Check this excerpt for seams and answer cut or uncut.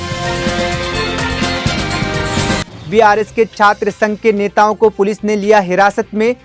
uncut